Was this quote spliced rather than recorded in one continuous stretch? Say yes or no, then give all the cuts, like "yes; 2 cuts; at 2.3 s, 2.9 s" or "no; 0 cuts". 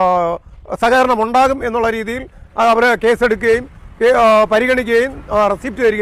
no; 0 cuts